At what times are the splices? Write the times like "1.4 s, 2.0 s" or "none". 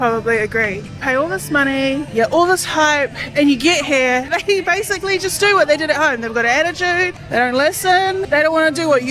2.1 s, 4.3 s, 7.2 s, 8.3 s